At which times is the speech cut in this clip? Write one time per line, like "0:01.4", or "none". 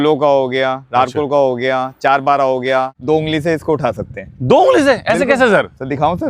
0:02.9